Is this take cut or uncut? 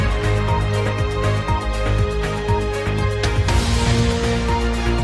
cut